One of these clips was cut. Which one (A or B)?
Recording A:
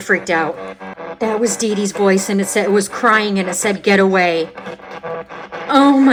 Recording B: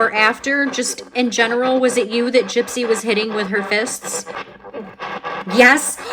B